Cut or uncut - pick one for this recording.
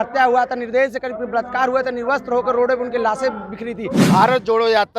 cut